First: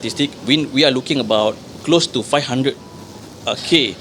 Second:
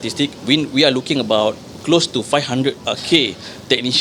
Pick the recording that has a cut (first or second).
second